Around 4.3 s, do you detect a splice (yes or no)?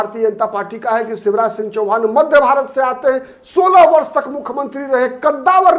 no